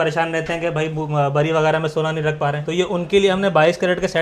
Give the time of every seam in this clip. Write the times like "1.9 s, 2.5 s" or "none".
none